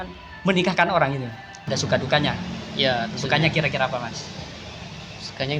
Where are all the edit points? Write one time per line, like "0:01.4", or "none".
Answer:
0:01.6